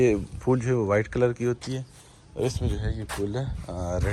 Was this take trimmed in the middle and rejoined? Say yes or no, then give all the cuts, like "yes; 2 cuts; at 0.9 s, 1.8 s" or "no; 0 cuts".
no; 0 cuts